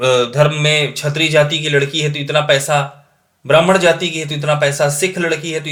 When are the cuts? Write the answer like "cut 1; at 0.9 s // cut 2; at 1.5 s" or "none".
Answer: none